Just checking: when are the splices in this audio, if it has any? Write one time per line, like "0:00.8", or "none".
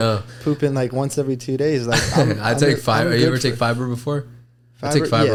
none